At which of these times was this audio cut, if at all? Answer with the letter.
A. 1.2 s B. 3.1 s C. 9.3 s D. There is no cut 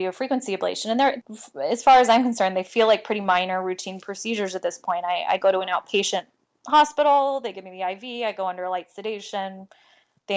A